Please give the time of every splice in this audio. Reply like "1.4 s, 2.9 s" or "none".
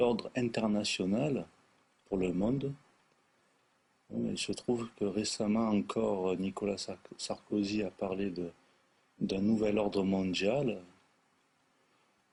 none

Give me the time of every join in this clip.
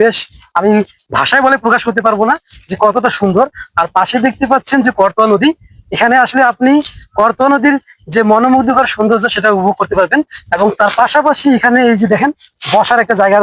none

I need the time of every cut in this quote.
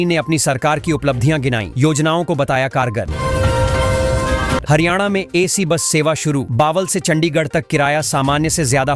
none

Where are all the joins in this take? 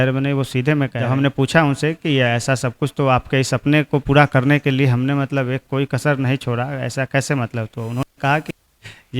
1.0 s

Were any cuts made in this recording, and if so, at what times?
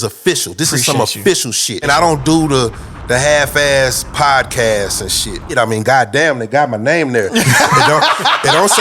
1.9 s, 5.5 s

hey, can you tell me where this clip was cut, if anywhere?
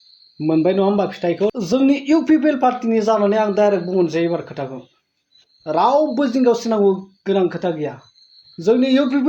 1.5 s

